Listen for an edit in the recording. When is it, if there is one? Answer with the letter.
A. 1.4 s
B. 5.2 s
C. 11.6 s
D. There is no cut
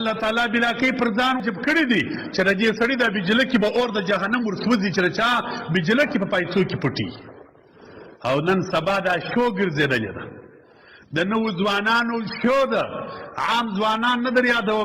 A